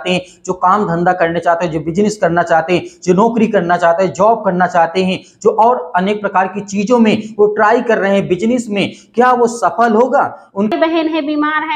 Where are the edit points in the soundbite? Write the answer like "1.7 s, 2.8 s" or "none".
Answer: 10.7 s